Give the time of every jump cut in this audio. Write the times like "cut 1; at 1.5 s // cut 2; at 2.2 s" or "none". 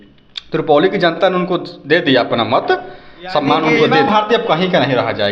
cut 1; at 4.0 s